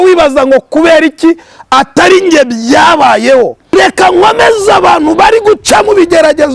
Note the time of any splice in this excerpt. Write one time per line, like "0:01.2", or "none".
0:03.6